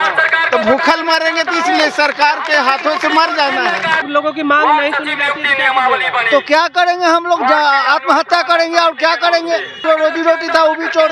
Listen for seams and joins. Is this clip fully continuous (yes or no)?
no